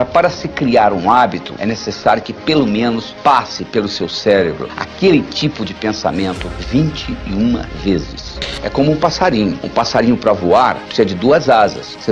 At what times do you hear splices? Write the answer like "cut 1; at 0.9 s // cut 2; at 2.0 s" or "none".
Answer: cut 1; at 8.5 s